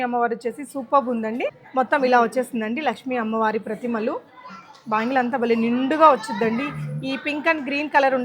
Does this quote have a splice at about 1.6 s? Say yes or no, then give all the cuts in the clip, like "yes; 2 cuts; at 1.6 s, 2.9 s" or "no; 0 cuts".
yes; 1 cut; at 1.6 s